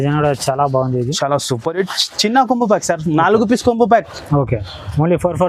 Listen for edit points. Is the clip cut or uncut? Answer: uncut